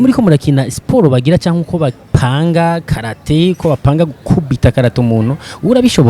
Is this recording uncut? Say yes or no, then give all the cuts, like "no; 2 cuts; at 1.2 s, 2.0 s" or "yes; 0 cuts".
yes; 0 cuts